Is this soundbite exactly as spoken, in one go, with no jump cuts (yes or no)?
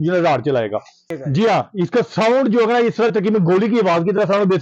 no